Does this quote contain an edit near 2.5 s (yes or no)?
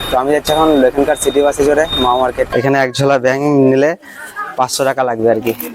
yes